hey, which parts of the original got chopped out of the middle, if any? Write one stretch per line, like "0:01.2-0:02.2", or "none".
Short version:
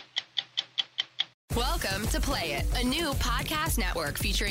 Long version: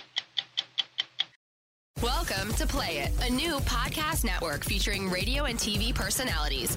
0:01.4-0:01.8